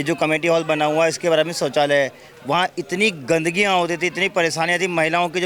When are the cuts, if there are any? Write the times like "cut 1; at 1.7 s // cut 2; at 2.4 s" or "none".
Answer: none